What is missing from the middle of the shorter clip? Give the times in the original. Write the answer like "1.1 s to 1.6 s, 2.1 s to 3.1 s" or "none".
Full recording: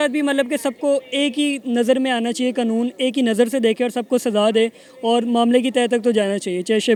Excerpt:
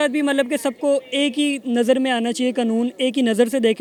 none